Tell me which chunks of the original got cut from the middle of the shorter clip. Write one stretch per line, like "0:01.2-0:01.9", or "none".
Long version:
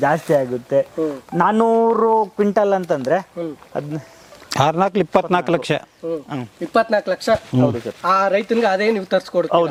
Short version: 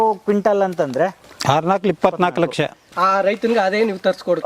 0:03.4-0:04.4
0:05.9-0:07.9